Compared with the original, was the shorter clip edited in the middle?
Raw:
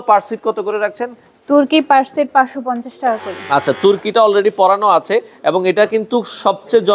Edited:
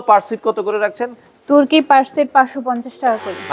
no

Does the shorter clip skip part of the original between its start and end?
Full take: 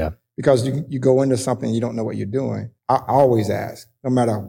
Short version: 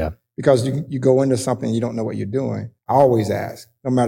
yes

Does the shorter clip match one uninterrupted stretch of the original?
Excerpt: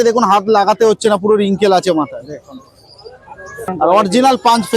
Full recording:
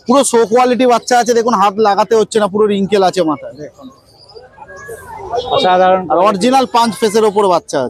no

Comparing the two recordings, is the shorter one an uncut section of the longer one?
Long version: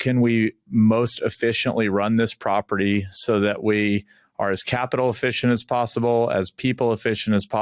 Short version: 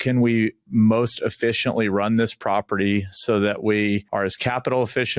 no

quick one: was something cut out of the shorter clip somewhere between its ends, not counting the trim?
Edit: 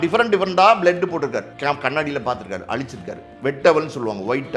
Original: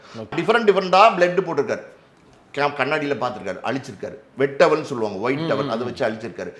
yes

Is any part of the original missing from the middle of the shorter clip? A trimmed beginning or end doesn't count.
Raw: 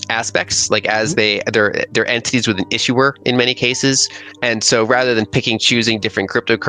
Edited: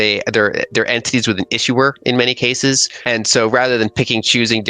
yes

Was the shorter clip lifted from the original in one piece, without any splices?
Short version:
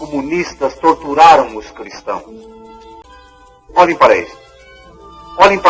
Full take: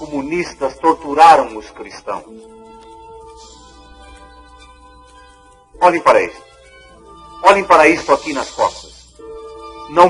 no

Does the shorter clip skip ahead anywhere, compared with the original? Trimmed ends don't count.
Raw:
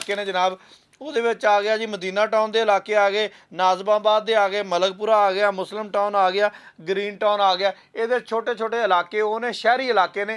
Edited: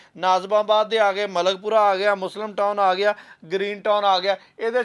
no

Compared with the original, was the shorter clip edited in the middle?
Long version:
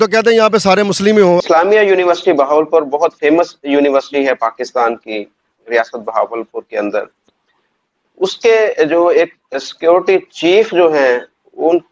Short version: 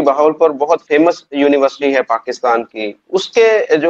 yes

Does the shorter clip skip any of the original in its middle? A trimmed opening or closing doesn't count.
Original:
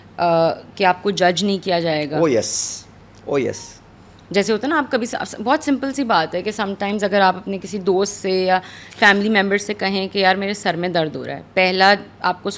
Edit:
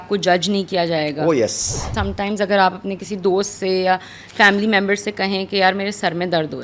yes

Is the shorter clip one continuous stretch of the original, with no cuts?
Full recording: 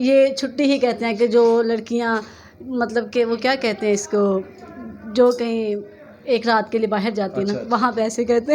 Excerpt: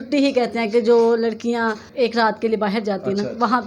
no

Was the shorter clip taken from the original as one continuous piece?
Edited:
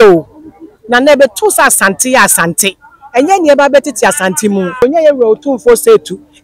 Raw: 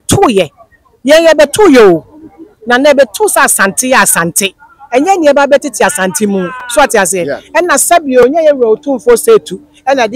no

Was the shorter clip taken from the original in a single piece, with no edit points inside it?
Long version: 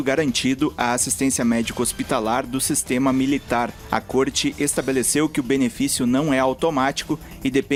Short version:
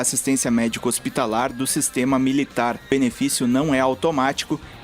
no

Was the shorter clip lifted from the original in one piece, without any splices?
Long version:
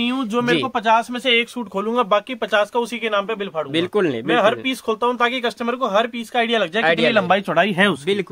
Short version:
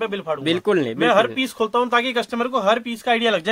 yes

